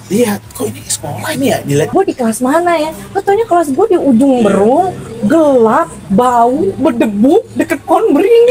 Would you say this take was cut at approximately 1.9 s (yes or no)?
yes